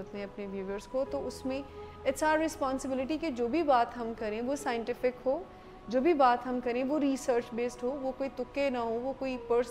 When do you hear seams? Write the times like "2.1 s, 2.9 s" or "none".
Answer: none

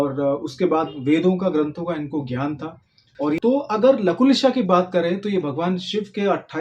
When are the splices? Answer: 3.4 s

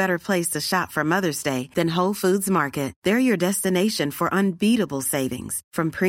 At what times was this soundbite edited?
none

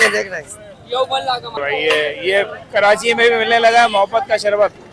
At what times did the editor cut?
1.6 s

